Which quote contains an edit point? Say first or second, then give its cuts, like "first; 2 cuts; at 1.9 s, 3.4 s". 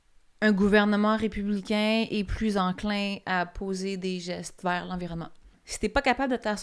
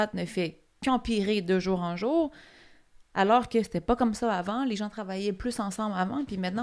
first; 1 cut; at 5.6 s